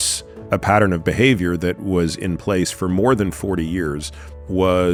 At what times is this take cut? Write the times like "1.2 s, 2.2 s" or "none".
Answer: none